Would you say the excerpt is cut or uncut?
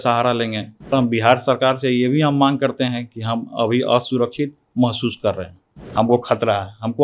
cut